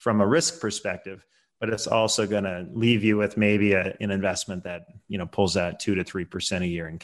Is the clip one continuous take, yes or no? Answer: yes